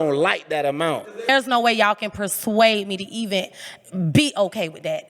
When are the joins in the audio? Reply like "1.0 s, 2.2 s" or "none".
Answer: 1.3 s

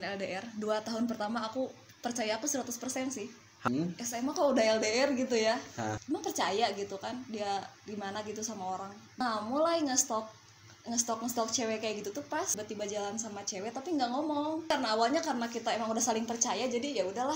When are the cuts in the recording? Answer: 3.5 s, 6.0 s, 9.2 s, 12.5 s, 14.7 s

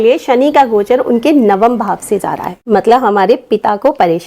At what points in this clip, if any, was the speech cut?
2.6 s

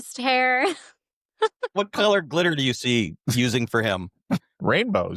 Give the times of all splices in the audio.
1.7 s

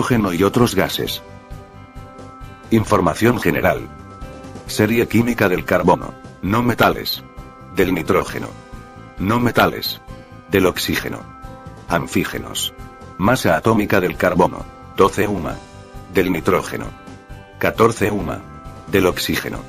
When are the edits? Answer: 2.6 s, 16.6 s

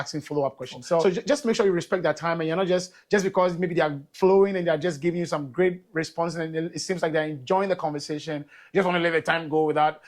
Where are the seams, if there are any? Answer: 1.0 s

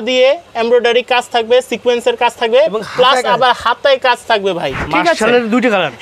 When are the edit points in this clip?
4.8 s

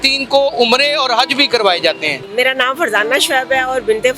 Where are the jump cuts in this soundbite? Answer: 2.2 s

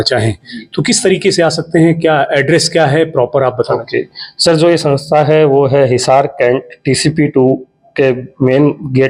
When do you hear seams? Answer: none

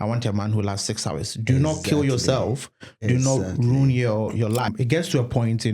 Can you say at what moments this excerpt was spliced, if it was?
4.7 s

